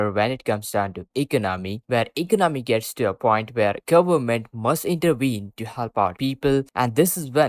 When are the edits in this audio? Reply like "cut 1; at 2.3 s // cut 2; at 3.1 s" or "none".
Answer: none